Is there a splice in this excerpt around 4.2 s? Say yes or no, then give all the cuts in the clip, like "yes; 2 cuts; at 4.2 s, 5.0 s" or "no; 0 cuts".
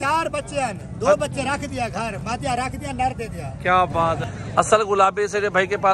yes; 1 cut; at 4.2 s